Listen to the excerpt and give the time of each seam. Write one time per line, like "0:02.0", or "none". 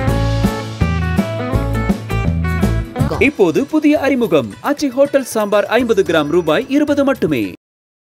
0:03.1